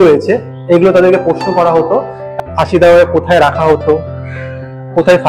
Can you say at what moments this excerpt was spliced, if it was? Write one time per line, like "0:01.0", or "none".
0:02.3